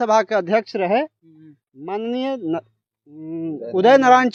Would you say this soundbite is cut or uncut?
uncut